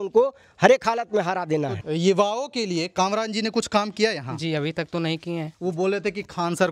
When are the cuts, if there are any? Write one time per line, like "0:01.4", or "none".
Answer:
0:01.8
0:05.5